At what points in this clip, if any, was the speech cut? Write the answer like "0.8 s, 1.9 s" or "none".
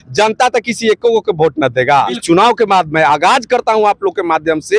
2.2 s